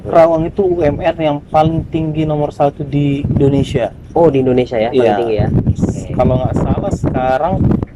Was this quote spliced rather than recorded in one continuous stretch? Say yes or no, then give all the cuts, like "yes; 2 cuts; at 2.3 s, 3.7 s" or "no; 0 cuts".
no; 0 cuts